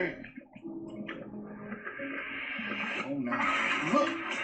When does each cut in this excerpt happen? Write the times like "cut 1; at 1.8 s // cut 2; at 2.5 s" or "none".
none